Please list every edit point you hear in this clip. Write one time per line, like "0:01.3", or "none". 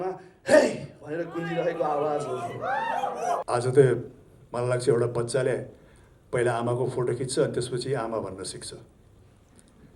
0:03.4